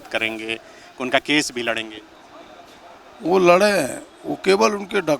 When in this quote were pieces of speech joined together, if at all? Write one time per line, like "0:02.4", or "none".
none